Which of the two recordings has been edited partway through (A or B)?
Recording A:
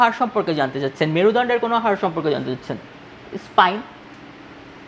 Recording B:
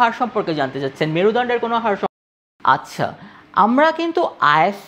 B